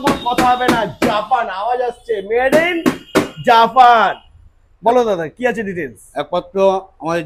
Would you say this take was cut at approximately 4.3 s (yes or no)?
no